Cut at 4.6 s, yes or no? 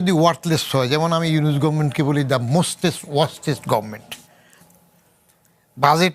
yes